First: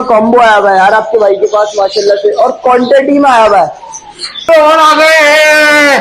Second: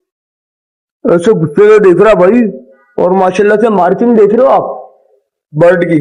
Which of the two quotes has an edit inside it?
first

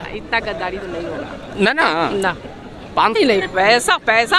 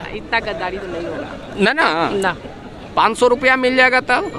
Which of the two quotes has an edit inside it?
first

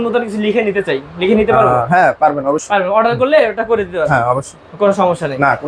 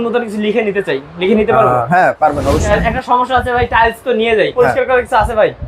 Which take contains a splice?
second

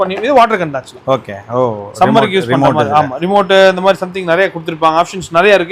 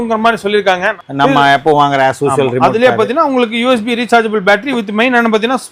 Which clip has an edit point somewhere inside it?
second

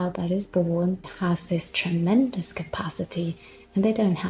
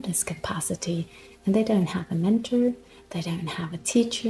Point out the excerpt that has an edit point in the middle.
first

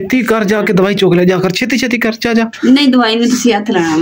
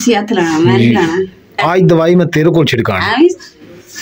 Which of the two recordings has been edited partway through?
second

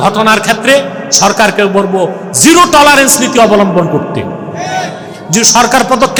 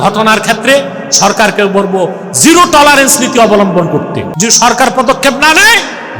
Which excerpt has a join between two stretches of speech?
second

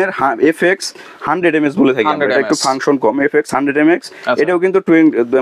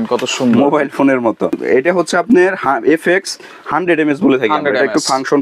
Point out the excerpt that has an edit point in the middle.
second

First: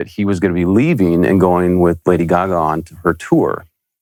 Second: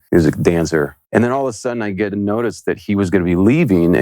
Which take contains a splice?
second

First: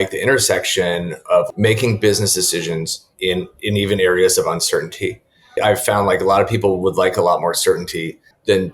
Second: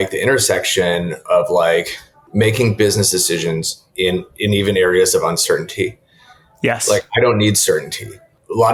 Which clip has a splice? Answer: first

